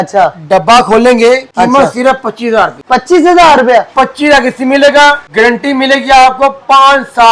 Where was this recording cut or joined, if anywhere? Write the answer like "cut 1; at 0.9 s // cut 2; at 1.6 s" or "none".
cut 1; at 1.5 s // cut 2; at 2.8 s // cut 3; at 5.2 s